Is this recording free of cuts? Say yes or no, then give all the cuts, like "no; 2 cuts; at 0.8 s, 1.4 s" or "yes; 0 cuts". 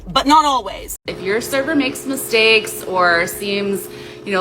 no; 1 cut; at 1.1 s